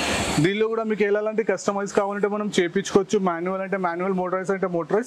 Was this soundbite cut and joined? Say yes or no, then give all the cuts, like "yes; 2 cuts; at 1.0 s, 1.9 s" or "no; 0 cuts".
no; 0 cuts